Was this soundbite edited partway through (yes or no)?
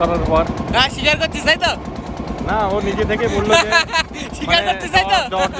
no